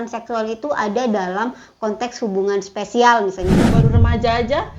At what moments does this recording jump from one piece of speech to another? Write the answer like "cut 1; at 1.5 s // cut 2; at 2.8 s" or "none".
cut 1; at 3.8 s